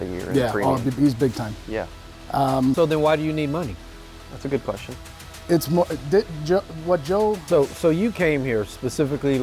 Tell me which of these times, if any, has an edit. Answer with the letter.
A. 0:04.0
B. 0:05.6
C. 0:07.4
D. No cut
C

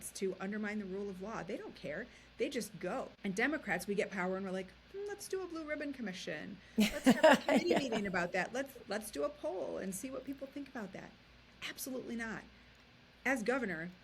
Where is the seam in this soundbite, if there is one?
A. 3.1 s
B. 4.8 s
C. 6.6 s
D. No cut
A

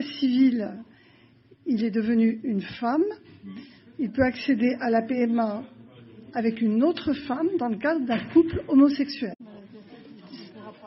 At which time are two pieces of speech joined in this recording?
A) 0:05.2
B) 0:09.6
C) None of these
B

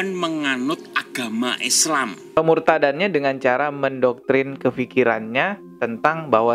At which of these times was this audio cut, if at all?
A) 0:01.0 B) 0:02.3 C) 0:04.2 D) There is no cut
B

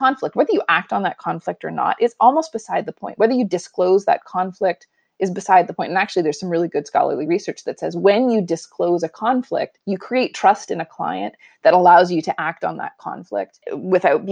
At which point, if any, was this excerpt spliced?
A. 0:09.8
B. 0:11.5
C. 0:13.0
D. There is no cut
A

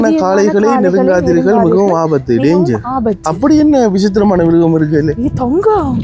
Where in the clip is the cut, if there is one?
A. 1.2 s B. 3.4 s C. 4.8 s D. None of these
D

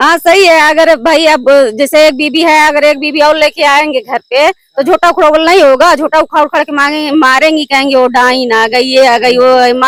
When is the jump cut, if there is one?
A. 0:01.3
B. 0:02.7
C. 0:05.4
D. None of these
D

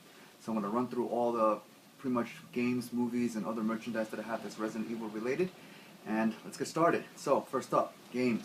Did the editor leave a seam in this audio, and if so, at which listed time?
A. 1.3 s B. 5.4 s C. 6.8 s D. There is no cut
D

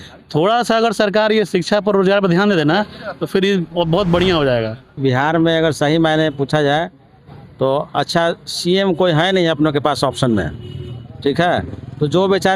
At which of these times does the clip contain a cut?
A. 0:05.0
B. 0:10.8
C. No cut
A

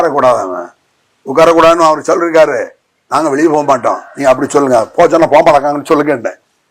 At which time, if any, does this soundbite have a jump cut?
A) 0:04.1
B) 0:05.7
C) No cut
C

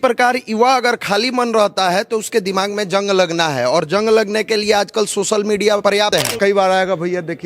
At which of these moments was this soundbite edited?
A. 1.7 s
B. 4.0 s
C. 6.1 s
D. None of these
C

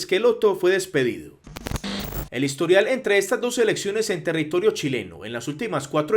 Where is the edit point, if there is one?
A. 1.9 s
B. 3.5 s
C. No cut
A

